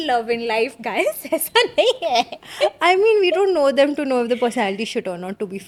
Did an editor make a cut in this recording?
no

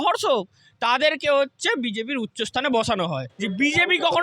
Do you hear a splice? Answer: yes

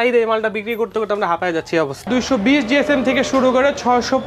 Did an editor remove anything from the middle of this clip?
yes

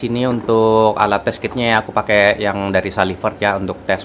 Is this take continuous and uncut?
yes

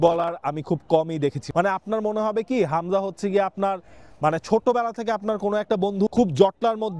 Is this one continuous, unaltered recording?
no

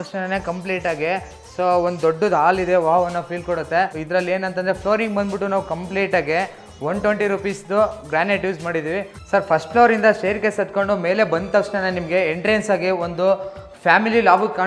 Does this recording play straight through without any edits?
no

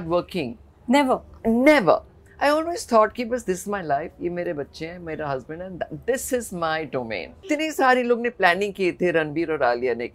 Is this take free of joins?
no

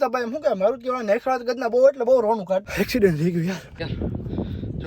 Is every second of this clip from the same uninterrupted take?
no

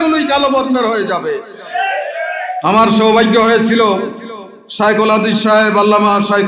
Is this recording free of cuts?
no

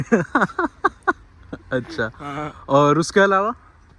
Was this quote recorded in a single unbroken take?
yes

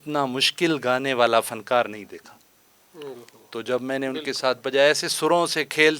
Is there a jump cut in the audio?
no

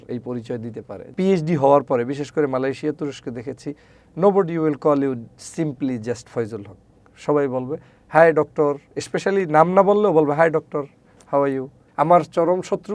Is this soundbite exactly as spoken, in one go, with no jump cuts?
no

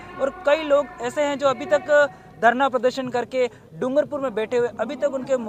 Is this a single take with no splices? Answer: yes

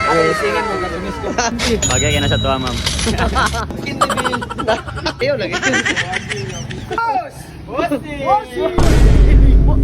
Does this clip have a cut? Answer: yes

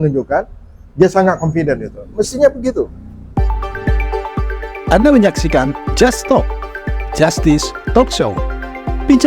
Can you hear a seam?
yes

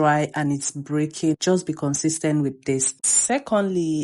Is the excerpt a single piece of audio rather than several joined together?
no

